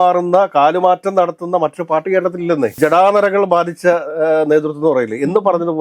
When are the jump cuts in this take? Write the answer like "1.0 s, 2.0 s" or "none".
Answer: 2.8 s

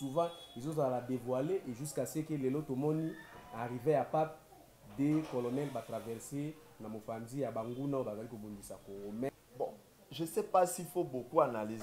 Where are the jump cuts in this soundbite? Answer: 9.3 s

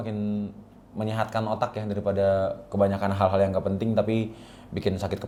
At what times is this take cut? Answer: none

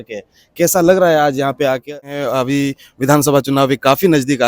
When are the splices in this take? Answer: 1.8 s

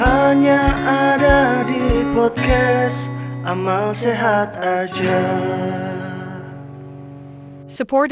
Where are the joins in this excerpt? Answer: none

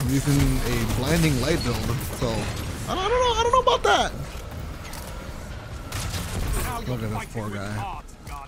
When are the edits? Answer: 5.5 s

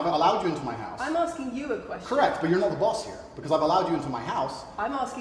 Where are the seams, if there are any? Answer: none

